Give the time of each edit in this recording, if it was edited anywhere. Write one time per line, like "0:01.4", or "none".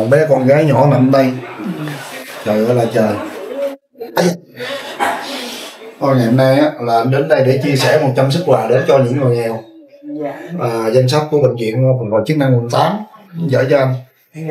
none